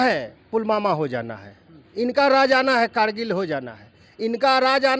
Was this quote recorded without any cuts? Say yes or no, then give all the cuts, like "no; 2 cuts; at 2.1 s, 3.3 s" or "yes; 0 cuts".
yes; 0 cuts